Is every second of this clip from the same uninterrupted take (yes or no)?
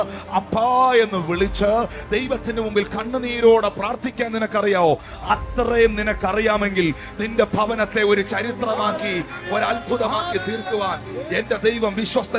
yes